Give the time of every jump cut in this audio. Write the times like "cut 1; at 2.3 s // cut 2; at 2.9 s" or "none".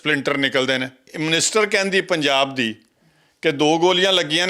cut 1; at 1.1 s